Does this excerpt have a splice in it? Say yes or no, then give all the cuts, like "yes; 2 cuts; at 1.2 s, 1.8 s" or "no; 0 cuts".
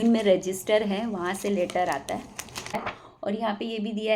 yes; 1 cut; at 2.8 s